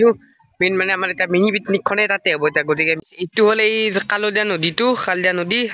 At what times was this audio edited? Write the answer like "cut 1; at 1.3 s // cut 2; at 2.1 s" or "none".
cut 1; at 3.0 s